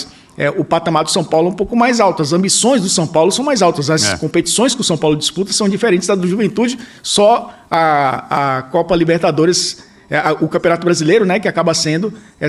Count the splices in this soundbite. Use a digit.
0